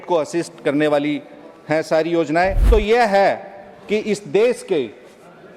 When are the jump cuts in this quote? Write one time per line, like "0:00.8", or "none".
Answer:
0:02.6